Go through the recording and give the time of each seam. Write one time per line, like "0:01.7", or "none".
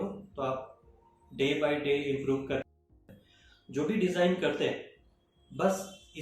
0:02.9